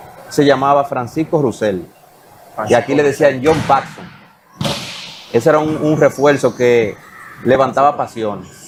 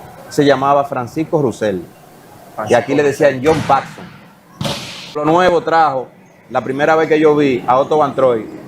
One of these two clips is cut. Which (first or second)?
second